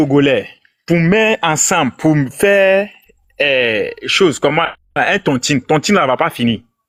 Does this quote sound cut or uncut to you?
uncut